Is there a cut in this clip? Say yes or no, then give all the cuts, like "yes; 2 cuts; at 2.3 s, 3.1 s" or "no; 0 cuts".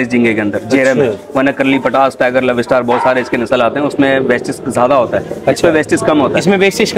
no; 0 cuts